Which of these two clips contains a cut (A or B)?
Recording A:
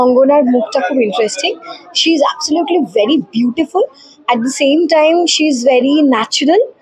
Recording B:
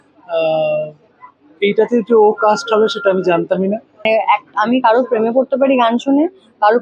B